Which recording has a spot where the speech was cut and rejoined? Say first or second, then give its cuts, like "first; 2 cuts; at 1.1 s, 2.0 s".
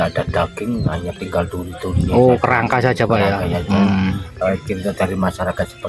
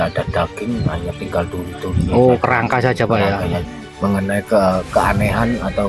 second; 1 cut; at 3.6 s